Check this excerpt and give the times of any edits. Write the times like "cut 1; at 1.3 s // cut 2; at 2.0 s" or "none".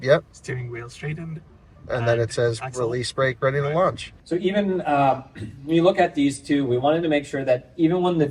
cut 1; at 4.1 s